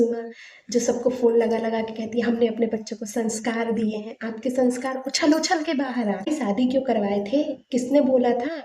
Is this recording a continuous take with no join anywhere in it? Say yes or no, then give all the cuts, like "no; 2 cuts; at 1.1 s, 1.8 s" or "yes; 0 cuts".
no; 1 cut; at 6.3 s